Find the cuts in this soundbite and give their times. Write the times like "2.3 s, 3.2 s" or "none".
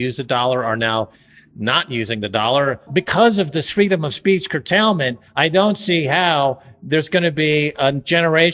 2.8 s